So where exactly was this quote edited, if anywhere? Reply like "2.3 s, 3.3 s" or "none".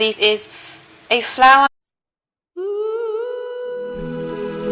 none